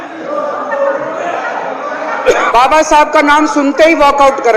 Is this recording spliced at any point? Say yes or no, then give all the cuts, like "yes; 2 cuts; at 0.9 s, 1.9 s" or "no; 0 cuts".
yes; 1 cut; at 2.5 s